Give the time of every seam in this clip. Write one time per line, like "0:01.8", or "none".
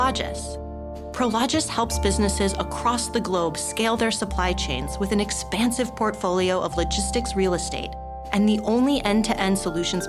none